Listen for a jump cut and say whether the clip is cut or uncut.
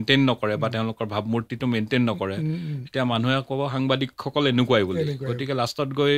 uncut